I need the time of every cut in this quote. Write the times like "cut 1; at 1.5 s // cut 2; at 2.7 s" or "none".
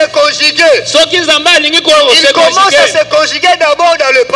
none